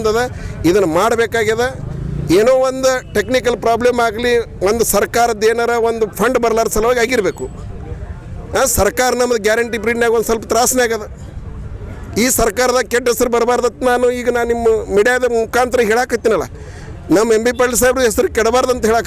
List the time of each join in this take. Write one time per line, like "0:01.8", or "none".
none